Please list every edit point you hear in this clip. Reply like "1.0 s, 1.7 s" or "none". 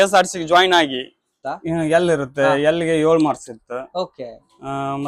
1.4 s